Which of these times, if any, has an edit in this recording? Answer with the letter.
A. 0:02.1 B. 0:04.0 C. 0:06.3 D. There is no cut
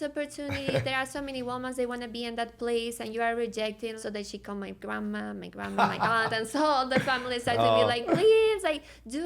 B